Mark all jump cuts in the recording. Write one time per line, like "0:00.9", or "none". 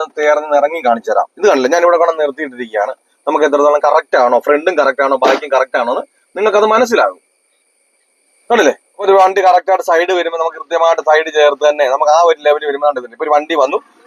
0:09.0